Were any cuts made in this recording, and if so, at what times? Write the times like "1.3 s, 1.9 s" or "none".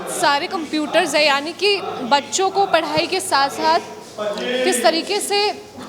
none